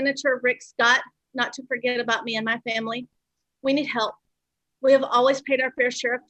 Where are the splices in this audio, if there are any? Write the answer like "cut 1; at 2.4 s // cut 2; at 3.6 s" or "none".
none